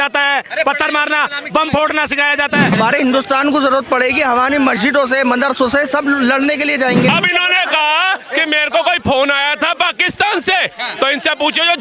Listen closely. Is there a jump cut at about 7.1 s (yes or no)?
yes